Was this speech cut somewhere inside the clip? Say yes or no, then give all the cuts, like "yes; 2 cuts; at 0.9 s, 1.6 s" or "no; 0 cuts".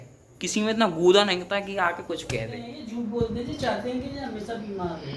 yes; 1 cut; at 2.8 s